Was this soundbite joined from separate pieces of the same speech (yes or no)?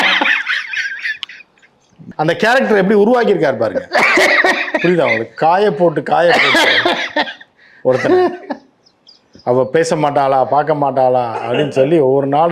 yes